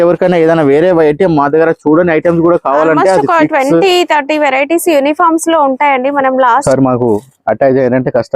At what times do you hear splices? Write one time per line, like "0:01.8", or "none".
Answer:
0:06.6